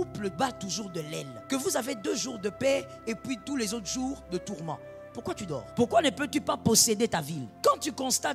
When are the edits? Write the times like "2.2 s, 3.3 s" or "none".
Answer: 1.3 s, 5.7 s, 7.5 s